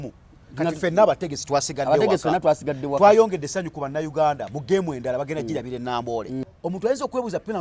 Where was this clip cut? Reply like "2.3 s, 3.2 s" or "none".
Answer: 6.4 s